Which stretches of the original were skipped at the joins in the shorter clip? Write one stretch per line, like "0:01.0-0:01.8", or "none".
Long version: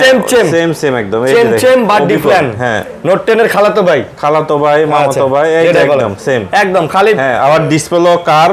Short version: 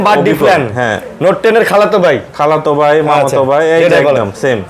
none